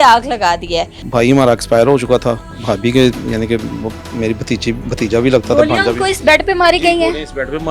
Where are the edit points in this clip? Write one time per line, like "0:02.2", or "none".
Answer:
0:01.0